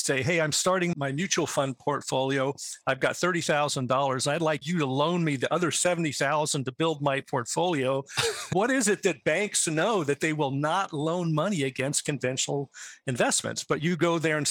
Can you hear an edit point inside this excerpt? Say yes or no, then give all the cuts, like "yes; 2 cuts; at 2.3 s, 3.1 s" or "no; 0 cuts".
yes; 2 cuts; at 0.9 s, 4.6 s